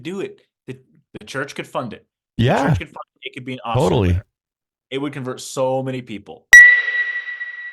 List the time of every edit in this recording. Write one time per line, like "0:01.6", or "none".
0:06.3